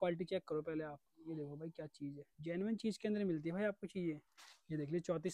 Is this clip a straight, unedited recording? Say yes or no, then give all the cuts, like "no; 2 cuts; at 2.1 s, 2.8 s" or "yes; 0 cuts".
yes; 0 cuts